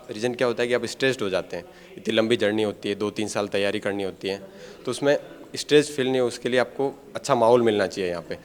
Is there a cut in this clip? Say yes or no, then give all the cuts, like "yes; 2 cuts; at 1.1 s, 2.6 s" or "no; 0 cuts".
no; 0 cuts